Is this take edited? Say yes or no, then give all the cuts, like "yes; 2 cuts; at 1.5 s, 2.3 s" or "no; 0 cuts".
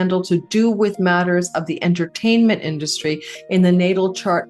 no; 0 cuts